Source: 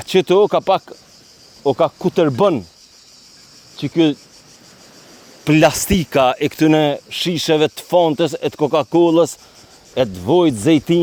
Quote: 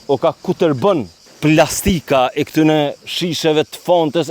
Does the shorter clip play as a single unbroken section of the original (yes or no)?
no